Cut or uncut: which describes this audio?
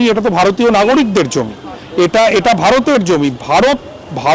uncut